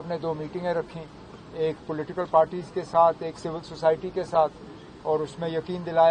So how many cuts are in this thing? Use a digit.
0